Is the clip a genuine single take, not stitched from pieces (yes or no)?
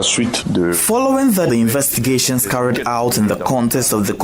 yes